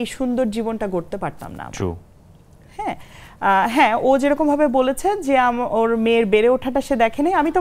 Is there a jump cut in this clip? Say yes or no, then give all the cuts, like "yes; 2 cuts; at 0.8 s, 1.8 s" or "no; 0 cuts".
no; 0 cuts